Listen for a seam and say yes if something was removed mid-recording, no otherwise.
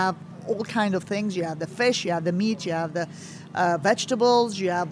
no